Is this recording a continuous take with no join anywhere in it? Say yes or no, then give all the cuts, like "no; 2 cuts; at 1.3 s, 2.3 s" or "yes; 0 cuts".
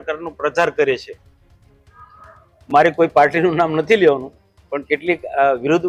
yes; 0 cuts